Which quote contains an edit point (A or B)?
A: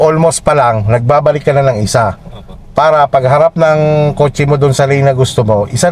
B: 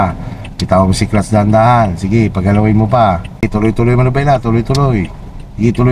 B